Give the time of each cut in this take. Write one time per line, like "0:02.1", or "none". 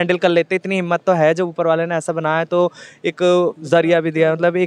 none